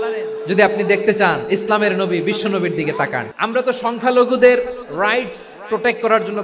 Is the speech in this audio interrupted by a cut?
yes; 1 cut; at 3.3 s

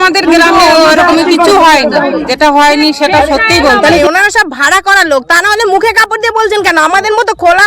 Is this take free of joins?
no; 2 cuts; at 2.2 s, 4.0 s

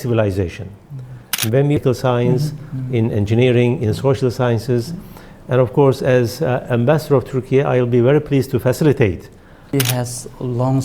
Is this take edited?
yes; 2 cuts; at 1.8 s, 9.7 s

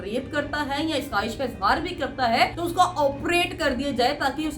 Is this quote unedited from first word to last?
no; 1 cut; at 2.6 s

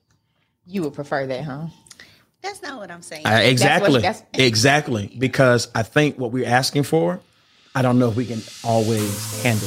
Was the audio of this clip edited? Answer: no; 0 cuts

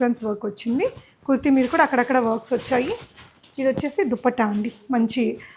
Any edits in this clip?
no; 0 cuts

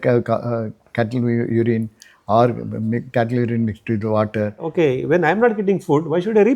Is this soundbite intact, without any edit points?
no; 1 cut; at 4.6 s

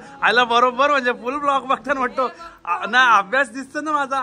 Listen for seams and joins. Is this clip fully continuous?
yes; 0 cuts

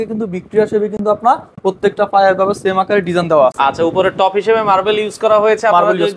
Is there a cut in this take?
no; 0 cuts

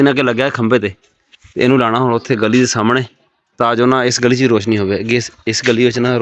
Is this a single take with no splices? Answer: yes; 0 cuts

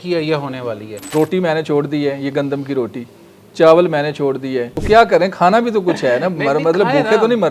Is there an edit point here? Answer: yes; 2 cuts; at 0.9 s, 4.8 s

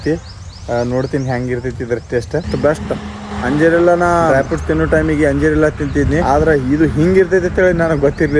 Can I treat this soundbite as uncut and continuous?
no; 4 cuts; at 2.5 s, 3.2 s, 4.3 s, 6.2 s

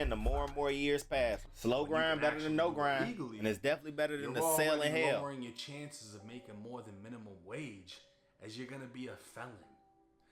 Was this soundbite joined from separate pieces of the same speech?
yes; 1 cut; at 1.5 s

